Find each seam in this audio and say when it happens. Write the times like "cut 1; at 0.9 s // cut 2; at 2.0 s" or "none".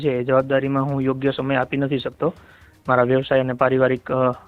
none